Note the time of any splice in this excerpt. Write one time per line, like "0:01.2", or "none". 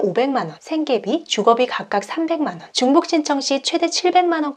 none